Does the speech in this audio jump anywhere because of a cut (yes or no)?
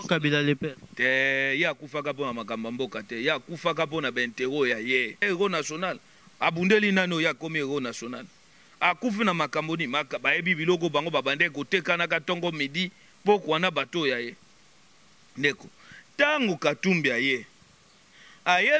yes